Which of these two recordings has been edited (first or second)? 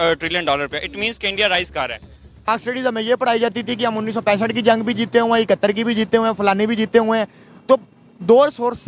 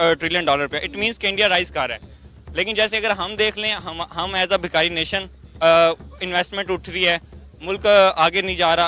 first